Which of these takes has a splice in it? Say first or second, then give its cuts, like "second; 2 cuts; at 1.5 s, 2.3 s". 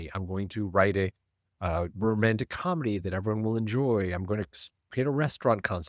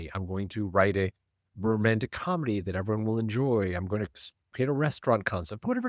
second; 1 cut; at 1.5 s